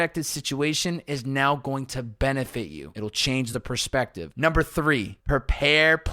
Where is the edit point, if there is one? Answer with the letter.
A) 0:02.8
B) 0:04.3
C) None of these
A